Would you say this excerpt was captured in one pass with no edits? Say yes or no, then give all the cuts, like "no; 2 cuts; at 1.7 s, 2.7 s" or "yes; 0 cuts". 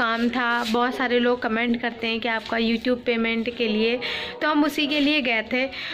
yes; 0 cuts